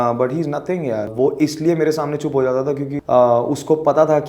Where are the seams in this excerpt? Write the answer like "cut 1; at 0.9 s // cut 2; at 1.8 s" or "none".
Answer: cut 1; at 1.1 s // cut 2; at 2.9 s